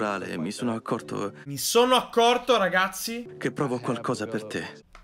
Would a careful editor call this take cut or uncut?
cut